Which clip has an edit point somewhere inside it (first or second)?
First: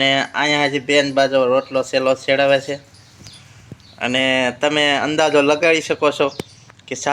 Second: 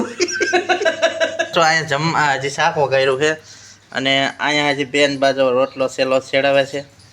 second